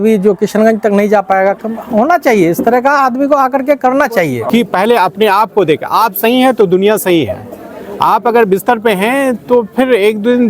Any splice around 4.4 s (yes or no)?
yes